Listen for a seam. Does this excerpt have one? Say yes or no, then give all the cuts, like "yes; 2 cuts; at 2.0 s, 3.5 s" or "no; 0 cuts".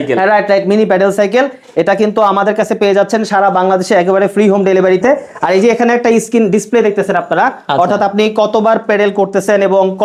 no; 0 cuts